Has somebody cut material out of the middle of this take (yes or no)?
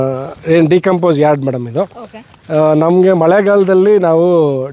no